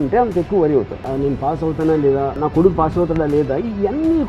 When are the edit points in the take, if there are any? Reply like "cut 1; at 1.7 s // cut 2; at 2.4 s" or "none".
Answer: cut 1; at 1.1 s // cut 2; at 2.4 s

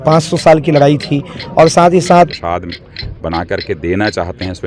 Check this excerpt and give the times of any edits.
cut 1; at 2.3 s

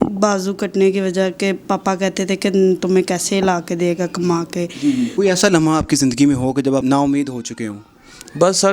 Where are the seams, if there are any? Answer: cut 1; at 5.1 s // cut 2; at 6.8 s

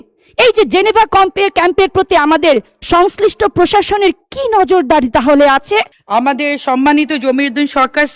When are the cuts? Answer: cut 1; at 6.0 s

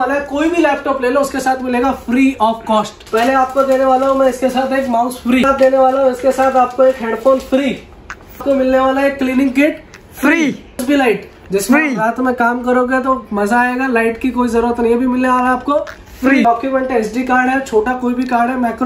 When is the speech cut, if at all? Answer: cut 1; at 3.0 s // cut 2; at 5.4 s // cut 3; at 8.4 s // cut 4; at 10.8 s // cut 5; at 16.4 s

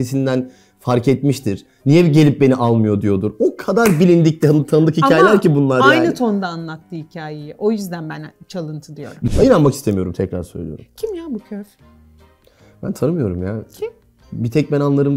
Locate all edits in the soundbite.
cut 1; at 9.3 s

